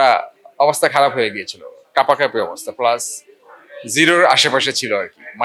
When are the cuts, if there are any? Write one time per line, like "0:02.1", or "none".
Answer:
none